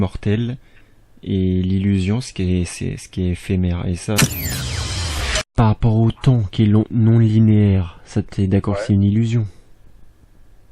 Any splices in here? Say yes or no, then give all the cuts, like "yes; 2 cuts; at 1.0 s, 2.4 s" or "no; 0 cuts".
yes; 2 cuts; at 4.2 s, 5.4 s